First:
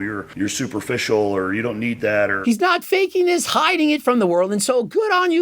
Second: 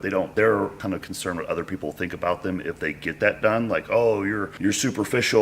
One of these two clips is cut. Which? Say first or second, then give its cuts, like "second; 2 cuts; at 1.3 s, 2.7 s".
first; 1 cut; at 2.4 s